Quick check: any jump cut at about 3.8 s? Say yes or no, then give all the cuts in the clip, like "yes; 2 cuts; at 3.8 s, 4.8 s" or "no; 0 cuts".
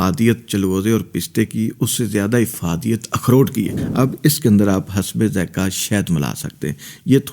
yes; 1 cut; at 3.8 s